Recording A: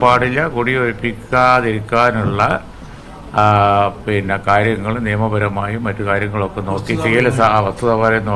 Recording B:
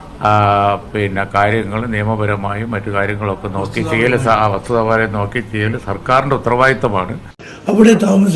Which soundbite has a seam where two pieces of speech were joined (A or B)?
B